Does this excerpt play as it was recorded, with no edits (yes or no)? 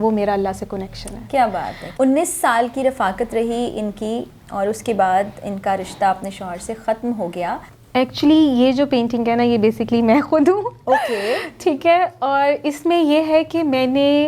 no